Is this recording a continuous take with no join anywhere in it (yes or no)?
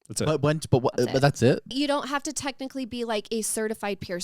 no